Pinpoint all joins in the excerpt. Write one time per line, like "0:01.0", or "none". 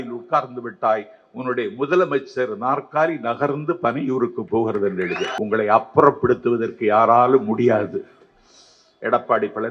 0:05.3